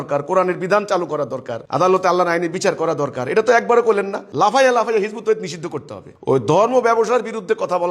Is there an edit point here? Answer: no; 0 cuts

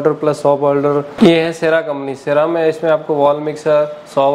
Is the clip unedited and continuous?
no; 1 cut; at 1.1 s

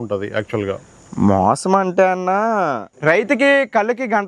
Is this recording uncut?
no; 1 cut; at 2.9 s

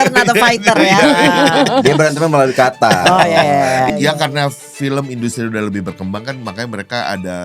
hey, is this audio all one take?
no; 1 cut; at 3.9 s

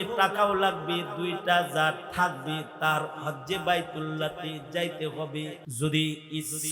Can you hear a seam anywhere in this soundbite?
yes; 1 cut; at 5.6 s

